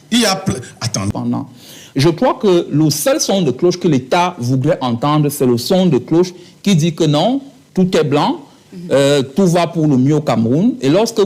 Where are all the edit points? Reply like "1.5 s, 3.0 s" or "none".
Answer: 1.1 s